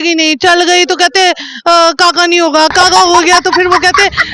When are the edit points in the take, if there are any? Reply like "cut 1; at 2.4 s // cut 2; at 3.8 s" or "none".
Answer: none